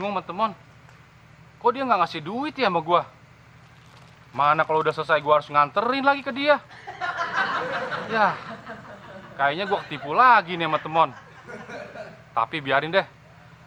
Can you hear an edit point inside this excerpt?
no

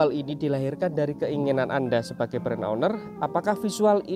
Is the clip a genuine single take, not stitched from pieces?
yes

